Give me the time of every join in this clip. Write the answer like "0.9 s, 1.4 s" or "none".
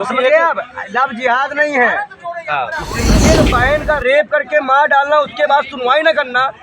3.2 s